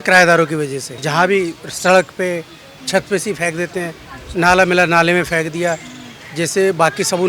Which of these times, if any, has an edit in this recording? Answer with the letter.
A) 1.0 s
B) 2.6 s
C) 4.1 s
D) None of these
A